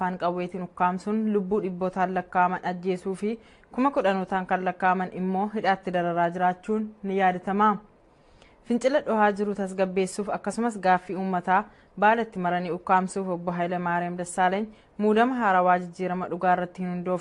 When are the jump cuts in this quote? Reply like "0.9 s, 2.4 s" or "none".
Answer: none